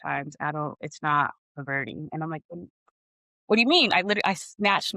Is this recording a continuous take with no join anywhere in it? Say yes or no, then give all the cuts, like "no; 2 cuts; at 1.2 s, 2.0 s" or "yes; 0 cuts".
yes; 0 cuts